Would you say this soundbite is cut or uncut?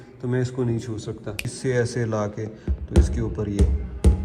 cut